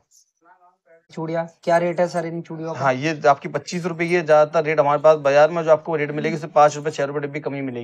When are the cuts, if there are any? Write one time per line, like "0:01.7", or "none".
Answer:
0:01.1